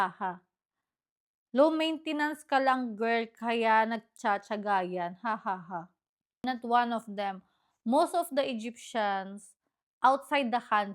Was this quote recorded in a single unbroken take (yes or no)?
no